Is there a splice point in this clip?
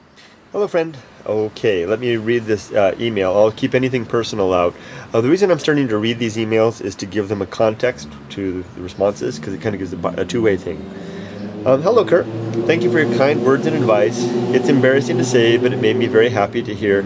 no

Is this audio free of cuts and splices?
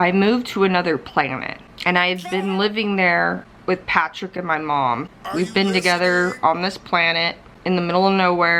no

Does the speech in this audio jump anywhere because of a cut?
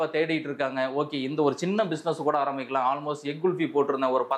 no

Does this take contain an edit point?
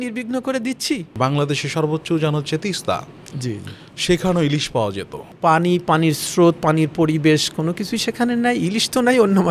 yes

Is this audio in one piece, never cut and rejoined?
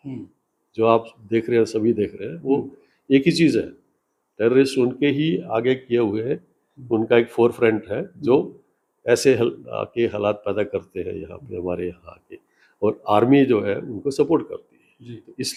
yes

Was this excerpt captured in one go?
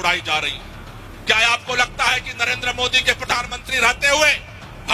yes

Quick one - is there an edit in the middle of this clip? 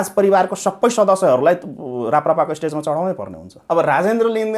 yes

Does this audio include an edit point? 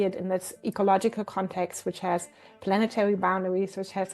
no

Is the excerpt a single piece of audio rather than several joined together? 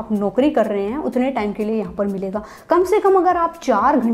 yes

